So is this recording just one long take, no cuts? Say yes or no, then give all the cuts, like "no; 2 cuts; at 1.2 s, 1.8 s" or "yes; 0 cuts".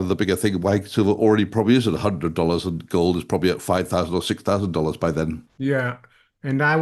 no; 1 cut; at 5.4 s